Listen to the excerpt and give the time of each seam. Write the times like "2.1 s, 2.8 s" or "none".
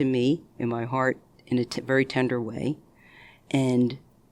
1.3 s